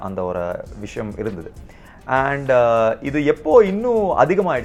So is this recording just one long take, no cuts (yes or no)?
yes